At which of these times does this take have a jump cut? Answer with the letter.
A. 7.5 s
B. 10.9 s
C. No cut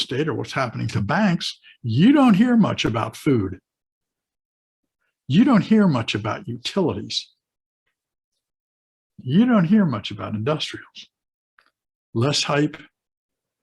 B